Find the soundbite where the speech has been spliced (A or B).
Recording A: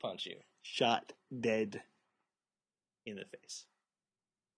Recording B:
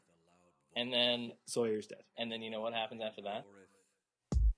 B